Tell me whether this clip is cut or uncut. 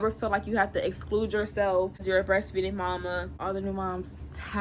cut